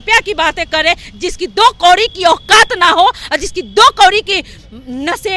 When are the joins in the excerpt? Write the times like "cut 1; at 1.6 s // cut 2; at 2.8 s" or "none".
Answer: none